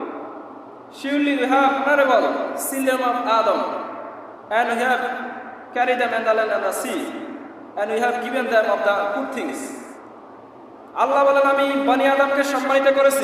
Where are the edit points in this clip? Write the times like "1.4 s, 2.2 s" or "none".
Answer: 1.8 s